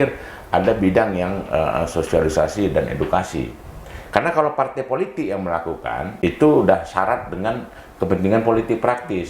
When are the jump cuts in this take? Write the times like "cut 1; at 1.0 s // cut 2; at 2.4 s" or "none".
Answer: cut 1; at 6.2 s